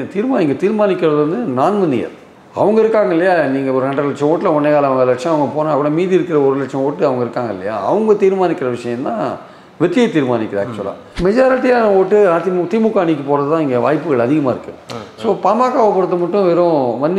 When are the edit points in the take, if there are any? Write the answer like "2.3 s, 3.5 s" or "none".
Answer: 11.1 s

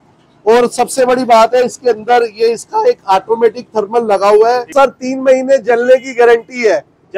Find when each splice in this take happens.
4.7 s

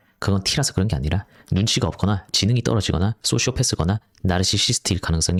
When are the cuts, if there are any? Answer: none

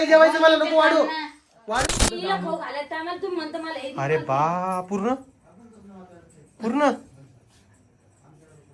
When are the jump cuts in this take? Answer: 1.8 s

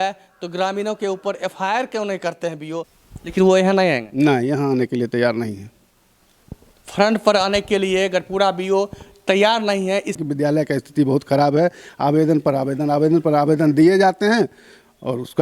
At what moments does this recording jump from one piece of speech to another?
3.0 s, 10.2 s

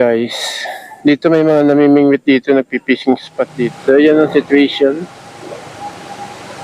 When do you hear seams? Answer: 3.8 s

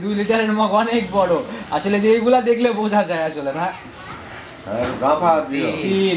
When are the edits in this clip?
none

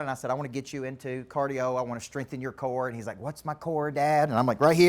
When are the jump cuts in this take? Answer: none

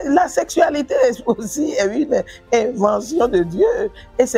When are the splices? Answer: none

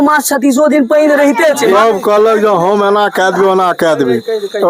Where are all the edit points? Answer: 1.7 s

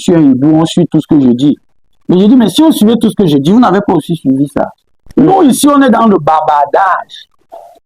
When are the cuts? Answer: 5.1 s

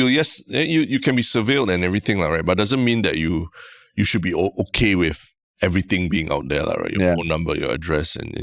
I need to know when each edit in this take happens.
none

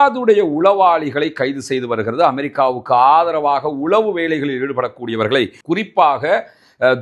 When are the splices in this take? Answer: 5.6 s

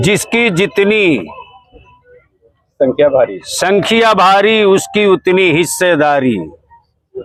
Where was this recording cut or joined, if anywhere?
none

